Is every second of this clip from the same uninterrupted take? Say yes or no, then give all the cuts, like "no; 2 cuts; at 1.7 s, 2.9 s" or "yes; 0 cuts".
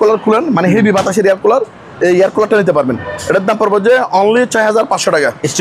yes; 0 cuts